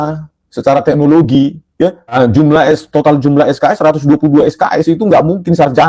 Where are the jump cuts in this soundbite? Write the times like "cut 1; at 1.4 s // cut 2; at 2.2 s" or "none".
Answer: cut 1; at 2.2 s